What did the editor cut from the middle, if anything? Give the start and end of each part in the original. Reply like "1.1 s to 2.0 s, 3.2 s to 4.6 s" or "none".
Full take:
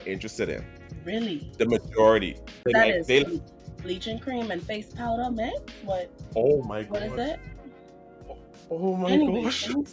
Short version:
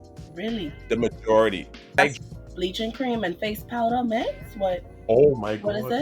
2.7 s to 3.2 s